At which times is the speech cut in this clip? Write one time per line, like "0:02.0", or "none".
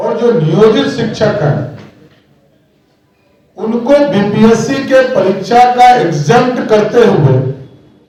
none